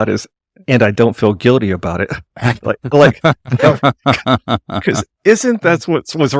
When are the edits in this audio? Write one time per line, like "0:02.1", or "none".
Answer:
none